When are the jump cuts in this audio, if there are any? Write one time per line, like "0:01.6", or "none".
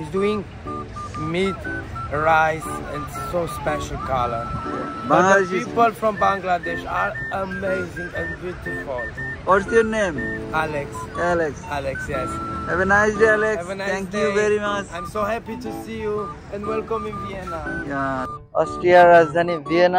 0:18.3